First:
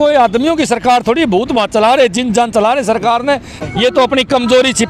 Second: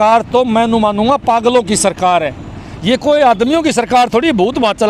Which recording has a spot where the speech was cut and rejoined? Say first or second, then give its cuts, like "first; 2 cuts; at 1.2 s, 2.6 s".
first; 1 cut; at 3.6 s